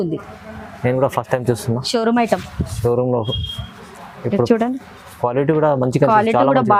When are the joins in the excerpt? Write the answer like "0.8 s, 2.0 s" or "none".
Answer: none